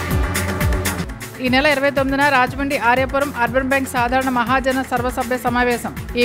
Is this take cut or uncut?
cut